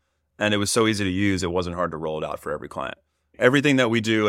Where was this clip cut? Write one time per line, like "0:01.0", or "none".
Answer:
0:03.3

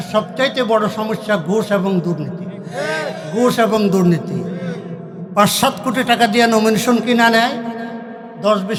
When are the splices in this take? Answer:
none

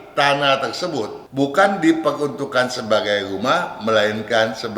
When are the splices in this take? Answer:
0:01.2

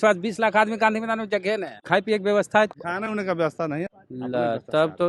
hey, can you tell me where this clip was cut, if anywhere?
0:01.7
0:02.7
0:03.9

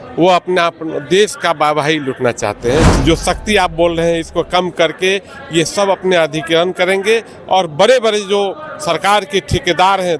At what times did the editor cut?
0:02.9

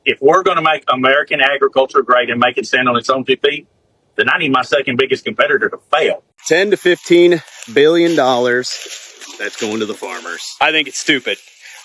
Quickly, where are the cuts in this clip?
0:06.3

